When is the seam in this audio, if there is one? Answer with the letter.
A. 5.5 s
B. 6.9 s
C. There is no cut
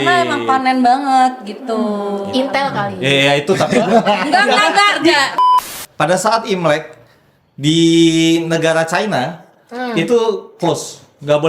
A